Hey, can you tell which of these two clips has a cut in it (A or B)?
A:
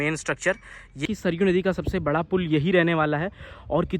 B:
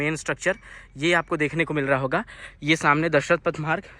A